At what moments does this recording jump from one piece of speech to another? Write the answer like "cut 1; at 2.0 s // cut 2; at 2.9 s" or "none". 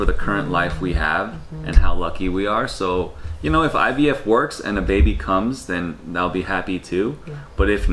none